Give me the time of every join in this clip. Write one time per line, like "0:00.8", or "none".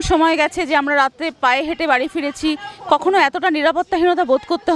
none